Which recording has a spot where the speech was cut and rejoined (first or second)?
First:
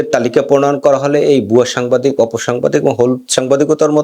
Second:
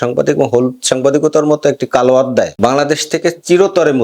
second